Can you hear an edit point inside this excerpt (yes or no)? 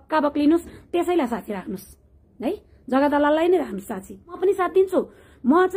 yes